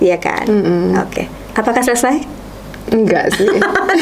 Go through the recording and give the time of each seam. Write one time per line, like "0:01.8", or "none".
none

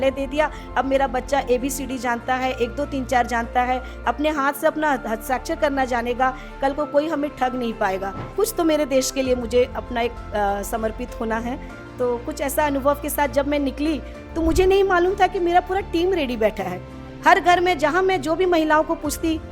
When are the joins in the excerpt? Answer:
0:08.3

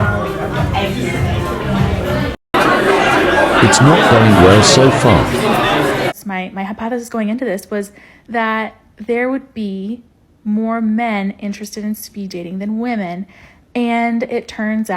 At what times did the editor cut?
0:06.1
0:13.4

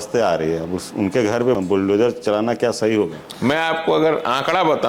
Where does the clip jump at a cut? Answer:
0:01.6
0:03.2

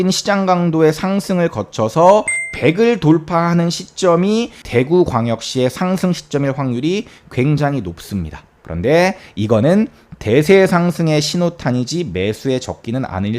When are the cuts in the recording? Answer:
0:02.4
0:04.6
0:08.6

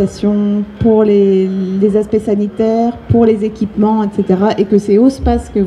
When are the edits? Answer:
none

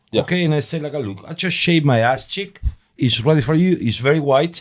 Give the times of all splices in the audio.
none

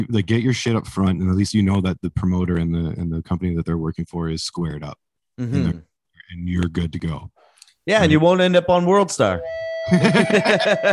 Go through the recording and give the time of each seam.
0:09.7

